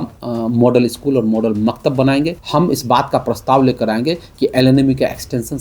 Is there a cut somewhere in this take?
yes; 1 cut; at 2.4 s

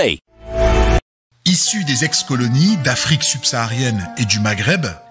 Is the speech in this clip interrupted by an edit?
yes; 1 cut; at 1.0 s

